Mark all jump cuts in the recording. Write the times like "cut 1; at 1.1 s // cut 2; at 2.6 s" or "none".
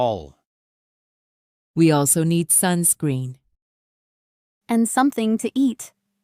none